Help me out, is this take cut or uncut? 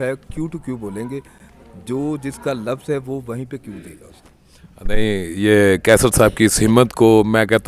uncut